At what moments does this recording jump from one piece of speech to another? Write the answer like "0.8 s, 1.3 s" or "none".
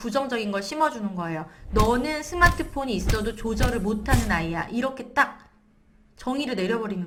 none